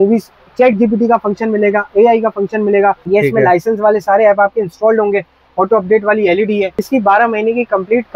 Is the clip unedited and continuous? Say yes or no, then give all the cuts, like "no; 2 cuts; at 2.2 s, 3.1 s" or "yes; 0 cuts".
no; 2 cuts; at 3.0 s, 6.8 s